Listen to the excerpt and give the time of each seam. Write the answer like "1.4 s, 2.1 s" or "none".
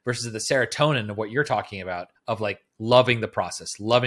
none